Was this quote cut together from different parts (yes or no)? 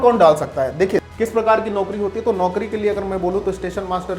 yes